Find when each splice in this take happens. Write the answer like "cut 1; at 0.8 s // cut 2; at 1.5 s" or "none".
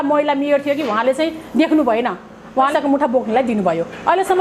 cut 1; at 2.7 s